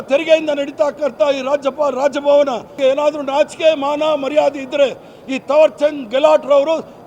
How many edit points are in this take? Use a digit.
1